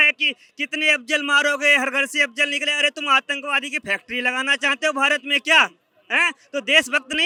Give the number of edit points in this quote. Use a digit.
0